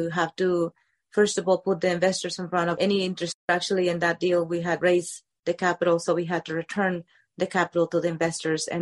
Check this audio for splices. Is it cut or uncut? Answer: cut